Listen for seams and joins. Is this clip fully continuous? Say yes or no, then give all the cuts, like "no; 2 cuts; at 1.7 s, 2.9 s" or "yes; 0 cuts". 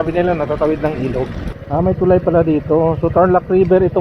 no; 1 cut; at 1.5 s